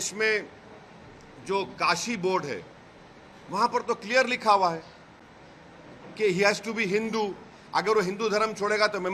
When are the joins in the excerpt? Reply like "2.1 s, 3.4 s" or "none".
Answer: none